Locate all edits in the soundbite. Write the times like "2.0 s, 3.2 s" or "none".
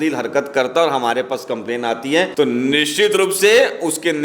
2.3 s